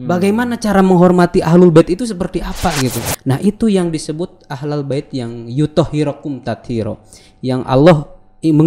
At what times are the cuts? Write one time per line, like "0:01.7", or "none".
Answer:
0:03.1